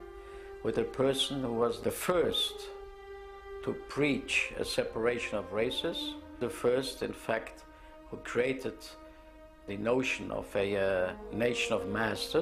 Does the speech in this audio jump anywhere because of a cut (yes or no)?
no